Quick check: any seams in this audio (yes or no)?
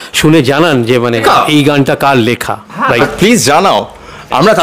yes